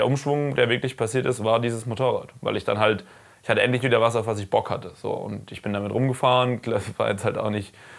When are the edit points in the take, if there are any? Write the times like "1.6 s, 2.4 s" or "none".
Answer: none